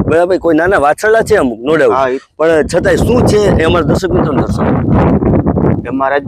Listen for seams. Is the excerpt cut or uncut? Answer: uncut